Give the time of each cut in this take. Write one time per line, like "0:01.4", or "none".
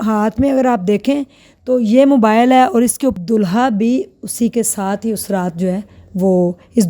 0:03.1